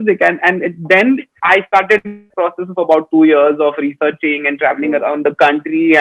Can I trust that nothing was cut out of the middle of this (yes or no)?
yes